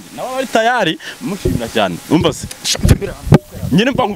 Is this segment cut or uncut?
uncut